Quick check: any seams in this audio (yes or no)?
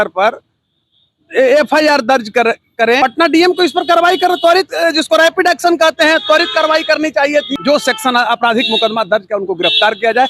yes